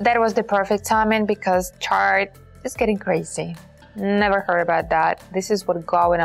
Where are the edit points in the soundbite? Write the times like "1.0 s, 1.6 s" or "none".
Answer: 3.8 s